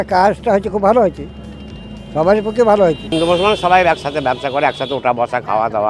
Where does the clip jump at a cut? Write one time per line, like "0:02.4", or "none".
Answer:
0:03.1